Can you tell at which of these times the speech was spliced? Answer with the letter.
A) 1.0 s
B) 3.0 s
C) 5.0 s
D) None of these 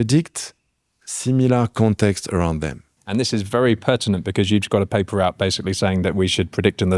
B